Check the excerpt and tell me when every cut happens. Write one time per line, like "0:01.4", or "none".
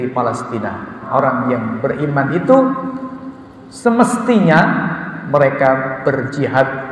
0:01.1